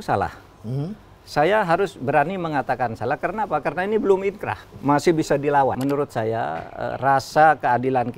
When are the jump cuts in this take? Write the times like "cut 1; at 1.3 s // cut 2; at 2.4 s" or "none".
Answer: cut 1; at 5.8 s